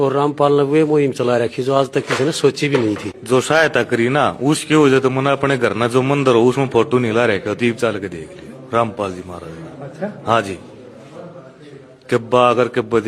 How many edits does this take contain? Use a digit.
1